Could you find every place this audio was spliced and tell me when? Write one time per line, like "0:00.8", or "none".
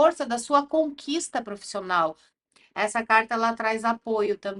0:02.3